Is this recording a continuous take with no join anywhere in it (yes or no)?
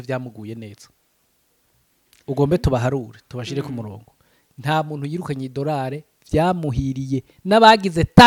yes